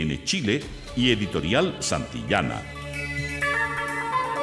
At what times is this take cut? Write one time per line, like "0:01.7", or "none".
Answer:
0:02.6